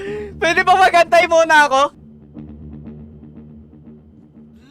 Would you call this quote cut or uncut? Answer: cut